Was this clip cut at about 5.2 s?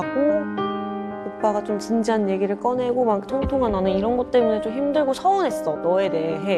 no; 0 cuts

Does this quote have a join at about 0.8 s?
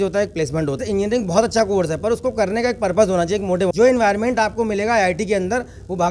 yes; 2 cuts; at 0.8 s, 3.7 s

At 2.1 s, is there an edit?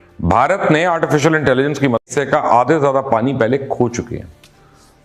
yes; 1 cut; at 2.1 s

